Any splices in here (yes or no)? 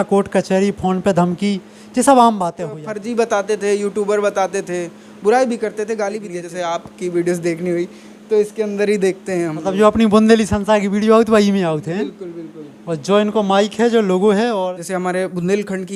yes